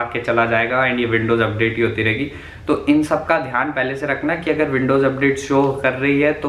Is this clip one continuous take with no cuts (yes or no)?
yes